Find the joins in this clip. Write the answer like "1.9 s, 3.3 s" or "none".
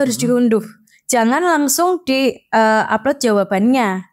none